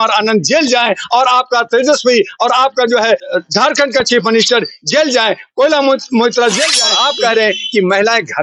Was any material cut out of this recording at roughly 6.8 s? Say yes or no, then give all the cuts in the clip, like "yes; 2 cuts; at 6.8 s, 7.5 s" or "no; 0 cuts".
yes; 2 cuts; at 3.3 s, 6.8 s